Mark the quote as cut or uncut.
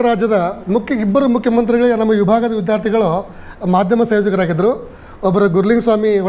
uncut